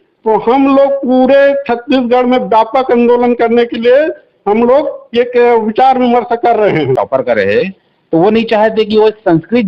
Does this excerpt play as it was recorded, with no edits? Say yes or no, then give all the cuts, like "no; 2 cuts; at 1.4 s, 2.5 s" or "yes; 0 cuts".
no; 1 cut; at 7.0 s